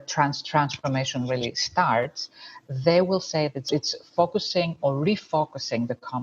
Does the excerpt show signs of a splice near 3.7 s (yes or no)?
yes